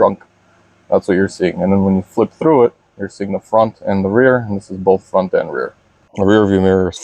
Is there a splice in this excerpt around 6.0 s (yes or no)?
yes